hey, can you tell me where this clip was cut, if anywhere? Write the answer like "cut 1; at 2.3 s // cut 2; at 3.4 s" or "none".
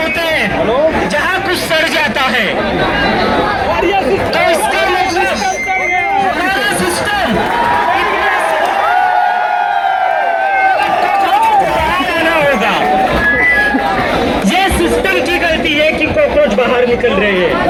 none